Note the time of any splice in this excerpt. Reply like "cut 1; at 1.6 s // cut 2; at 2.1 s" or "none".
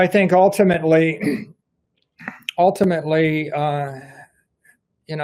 none